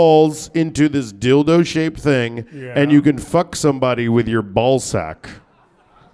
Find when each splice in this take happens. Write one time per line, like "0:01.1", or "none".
none